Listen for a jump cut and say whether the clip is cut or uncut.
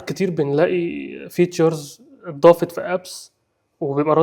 uncut